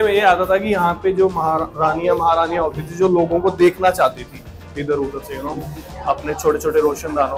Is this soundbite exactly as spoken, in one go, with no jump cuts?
yes; 0 cuts

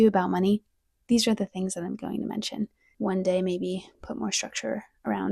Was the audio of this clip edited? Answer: yes; 1 cut; at 2.8 s

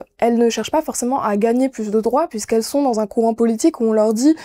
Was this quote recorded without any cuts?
yes; 0 cuts

